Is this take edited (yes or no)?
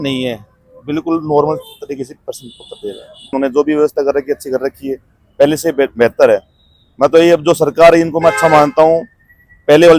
yes